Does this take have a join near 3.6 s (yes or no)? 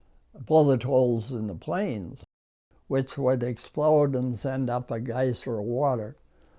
no